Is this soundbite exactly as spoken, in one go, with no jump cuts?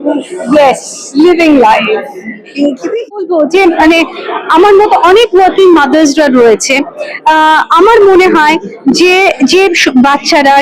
no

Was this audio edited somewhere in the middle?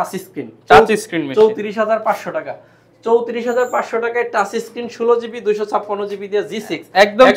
no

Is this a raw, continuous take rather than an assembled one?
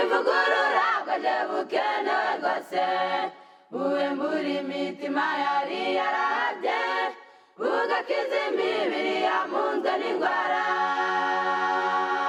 yes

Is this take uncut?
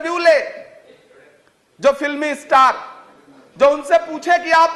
yes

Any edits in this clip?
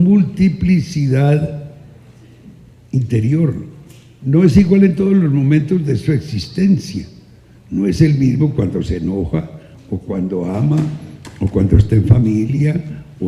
yes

